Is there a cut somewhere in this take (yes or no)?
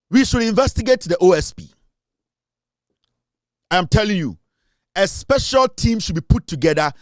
no